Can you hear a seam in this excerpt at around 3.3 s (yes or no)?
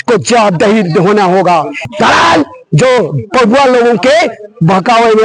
no